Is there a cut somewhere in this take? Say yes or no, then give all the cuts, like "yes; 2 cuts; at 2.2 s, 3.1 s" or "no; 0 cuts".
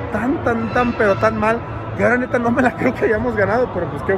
no; 0 cuts